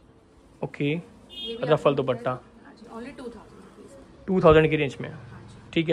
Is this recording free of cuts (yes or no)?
yes